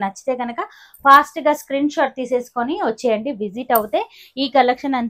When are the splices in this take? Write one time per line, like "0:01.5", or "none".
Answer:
none

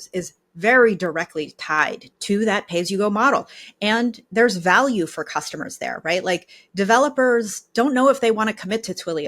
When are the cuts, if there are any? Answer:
0:02.1

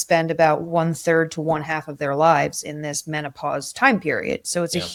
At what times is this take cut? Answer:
none

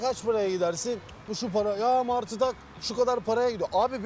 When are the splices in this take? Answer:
0:01.4

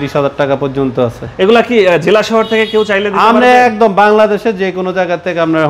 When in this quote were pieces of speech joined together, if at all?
none

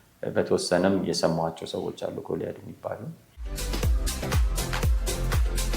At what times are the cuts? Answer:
0:03.6

